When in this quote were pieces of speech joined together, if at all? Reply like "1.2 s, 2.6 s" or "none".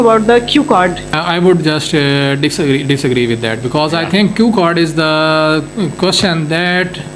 1.1 s